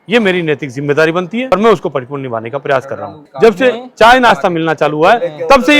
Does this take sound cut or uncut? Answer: uncut